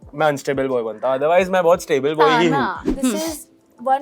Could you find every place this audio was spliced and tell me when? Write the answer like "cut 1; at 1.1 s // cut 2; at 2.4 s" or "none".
cut 1; at 2.8 s